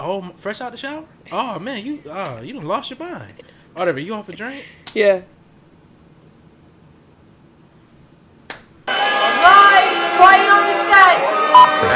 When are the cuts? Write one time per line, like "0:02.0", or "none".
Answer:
0:08.7